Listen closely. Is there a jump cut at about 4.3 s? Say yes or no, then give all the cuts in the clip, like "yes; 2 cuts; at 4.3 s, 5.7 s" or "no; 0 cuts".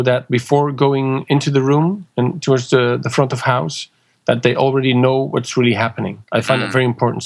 no; 2 cuts; at 2.0 s, 6.3 s